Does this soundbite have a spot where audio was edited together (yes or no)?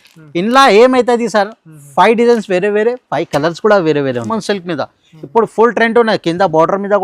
yes